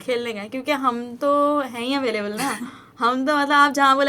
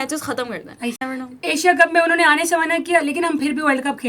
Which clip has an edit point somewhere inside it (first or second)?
second